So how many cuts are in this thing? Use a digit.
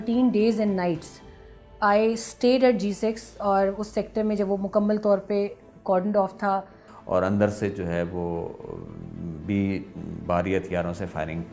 1